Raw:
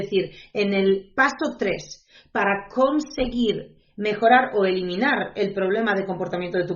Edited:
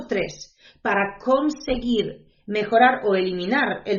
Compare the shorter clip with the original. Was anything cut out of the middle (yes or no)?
no